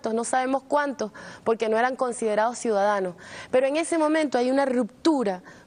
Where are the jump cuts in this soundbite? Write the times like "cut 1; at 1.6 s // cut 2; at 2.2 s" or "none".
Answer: none